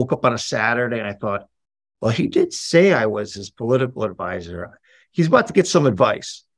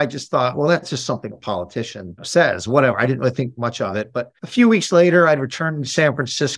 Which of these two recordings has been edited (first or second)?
second